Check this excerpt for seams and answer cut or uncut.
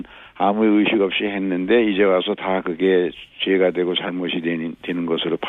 uncut